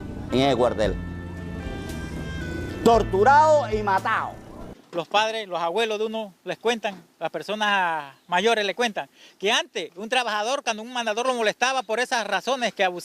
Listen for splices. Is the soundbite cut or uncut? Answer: uncut